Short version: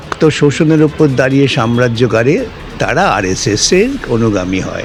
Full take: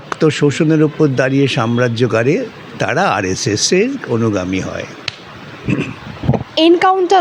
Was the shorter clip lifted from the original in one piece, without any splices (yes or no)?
yes